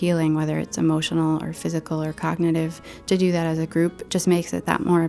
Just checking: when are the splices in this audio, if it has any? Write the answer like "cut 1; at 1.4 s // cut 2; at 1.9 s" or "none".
none